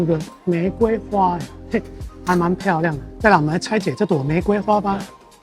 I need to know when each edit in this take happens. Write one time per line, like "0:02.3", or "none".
0:03.1